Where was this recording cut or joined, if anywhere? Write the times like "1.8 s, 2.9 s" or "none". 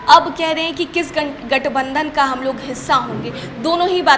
none